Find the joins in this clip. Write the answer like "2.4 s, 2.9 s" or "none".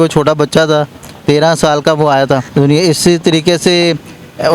2.5 s